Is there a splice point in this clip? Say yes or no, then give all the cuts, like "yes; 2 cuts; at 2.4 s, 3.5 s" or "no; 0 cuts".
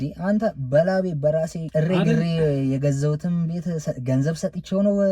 yes; 1 cut; at 1.6 s